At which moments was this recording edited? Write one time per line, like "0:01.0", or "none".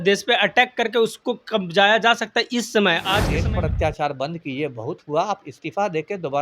0:03.3